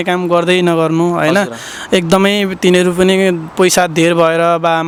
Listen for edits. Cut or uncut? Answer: uncut